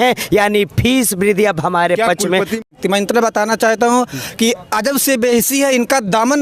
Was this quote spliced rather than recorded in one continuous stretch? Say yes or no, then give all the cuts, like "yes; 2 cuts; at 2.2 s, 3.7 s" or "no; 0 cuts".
yes; 1 cut; at 2.7 s